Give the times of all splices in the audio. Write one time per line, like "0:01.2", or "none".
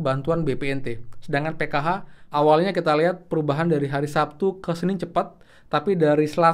0:02.1